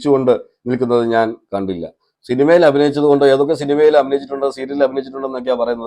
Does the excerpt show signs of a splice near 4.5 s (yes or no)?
no